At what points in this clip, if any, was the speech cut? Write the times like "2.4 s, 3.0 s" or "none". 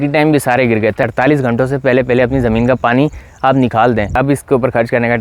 1.0 s, 4.1 s